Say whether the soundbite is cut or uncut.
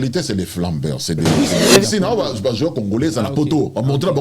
cut